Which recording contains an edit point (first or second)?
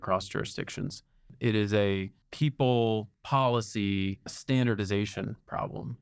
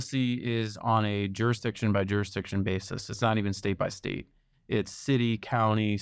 first